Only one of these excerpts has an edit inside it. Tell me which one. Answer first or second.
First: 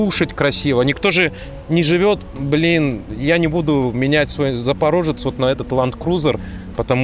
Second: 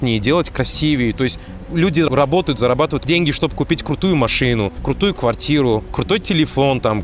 second